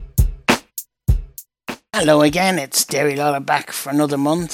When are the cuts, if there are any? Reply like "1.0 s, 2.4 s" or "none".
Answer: 1.5 s